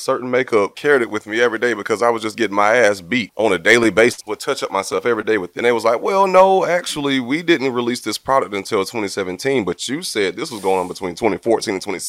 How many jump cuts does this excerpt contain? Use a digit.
4